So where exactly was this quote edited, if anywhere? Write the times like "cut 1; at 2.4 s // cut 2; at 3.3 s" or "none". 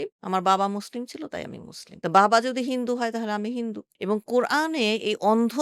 cut 1; at 3.9 s